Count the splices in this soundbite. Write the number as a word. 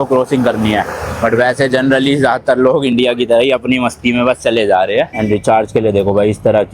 one